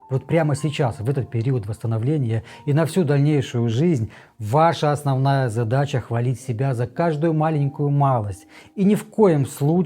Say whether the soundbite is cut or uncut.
uncut